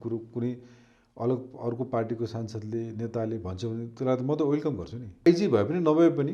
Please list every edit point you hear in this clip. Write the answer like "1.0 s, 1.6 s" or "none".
5.3 s